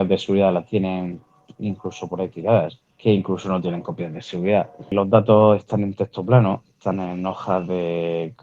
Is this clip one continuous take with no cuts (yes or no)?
no